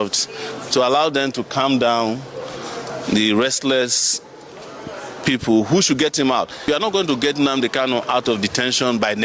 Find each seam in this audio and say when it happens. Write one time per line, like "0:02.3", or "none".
0:06.8